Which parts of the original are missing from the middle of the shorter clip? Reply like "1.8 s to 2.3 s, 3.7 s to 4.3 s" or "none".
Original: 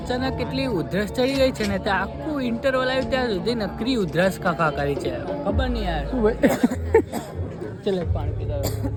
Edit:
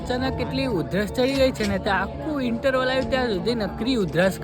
none